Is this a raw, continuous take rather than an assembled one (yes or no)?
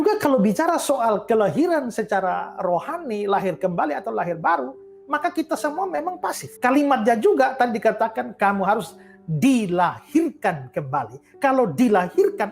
no